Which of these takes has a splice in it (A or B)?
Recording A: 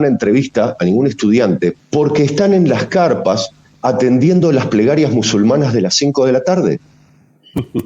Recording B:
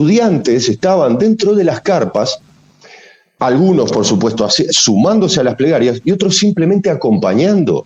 A